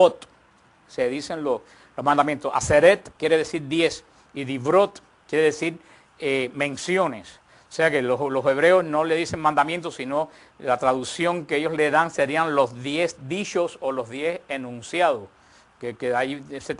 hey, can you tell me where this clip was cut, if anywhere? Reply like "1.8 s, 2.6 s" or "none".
none